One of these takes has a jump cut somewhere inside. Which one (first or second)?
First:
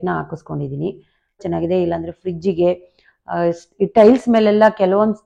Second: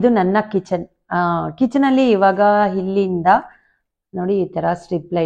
first